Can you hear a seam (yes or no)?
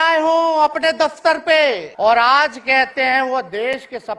yes